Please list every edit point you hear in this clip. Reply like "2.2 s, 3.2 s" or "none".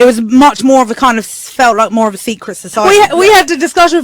2.8 s